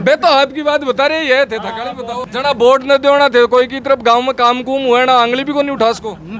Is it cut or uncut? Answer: cut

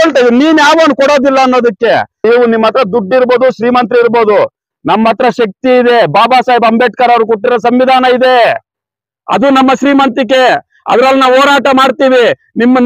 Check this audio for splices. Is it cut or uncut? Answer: cut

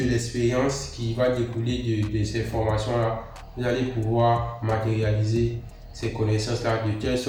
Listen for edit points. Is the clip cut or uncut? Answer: uncut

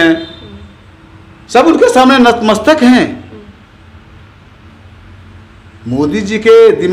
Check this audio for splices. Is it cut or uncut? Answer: uncut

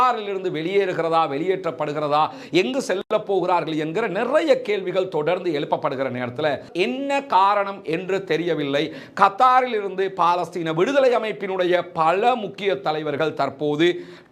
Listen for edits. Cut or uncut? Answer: cut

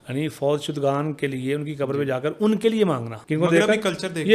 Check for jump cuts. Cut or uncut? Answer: cut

